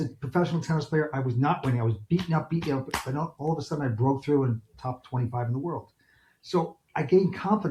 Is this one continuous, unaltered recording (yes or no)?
yes